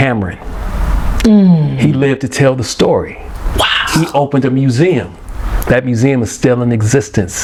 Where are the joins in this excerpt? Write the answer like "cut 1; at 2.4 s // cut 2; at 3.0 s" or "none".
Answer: none